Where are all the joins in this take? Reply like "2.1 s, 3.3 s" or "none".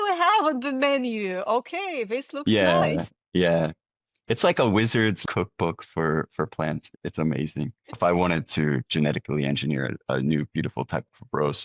5.2 s, 8.0 s

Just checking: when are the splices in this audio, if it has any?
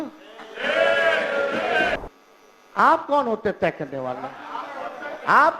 2.0 s

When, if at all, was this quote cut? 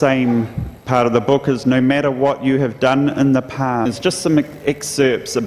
none

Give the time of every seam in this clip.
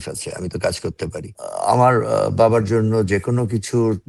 1.4 s

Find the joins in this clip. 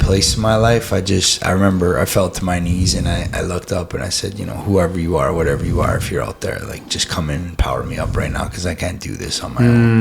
none

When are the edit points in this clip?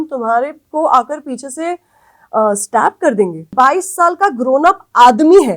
3.5 s

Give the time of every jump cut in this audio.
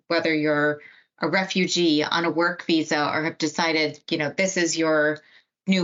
none

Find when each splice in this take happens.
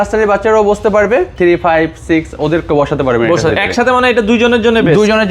1.3 s

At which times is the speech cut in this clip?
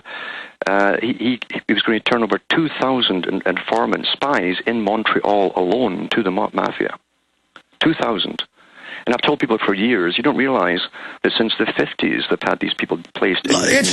none

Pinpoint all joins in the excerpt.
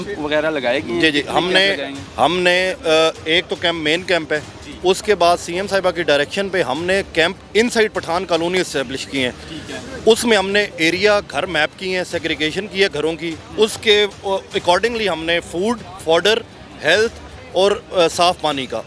none

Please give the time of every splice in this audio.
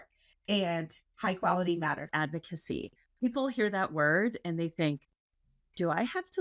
2.1 s

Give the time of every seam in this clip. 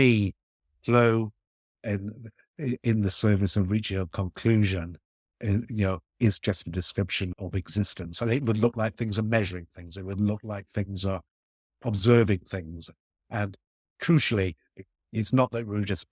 7.3 s, 11.7 s, 14.9 s

